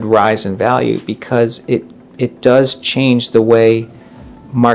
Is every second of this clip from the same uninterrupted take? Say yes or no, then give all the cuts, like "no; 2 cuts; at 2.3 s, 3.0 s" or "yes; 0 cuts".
yes; 0 cuts